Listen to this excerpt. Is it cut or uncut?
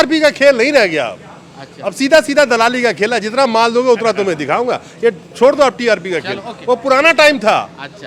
uncut